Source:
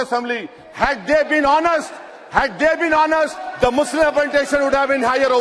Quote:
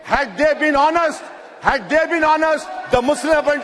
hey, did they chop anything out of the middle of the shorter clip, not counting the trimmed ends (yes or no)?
no